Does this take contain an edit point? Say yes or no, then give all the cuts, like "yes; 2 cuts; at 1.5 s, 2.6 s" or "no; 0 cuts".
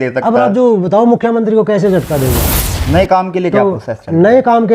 yes; 1 cut; at 2.4 s